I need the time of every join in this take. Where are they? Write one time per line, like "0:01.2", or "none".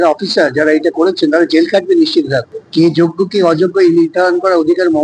0:02.5